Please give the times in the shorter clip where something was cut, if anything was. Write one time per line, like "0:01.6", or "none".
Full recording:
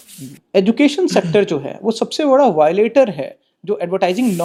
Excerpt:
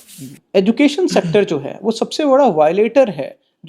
none